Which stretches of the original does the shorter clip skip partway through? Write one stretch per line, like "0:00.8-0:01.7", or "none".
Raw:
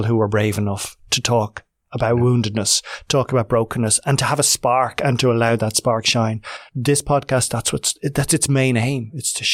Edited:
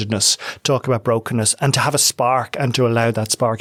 none